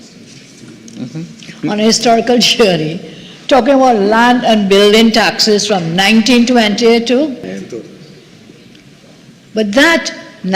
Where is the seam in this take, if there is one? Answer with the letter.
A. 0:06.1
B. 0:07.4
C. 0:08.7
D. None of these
B